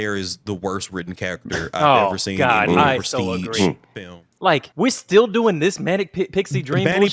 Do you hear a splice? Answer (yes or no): yes